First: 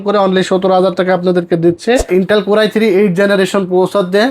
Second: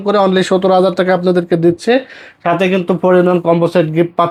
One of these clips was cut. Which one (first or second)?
first